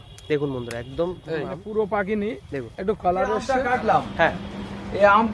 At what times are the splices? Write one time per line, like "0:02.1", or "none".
0:01.6
0:03.4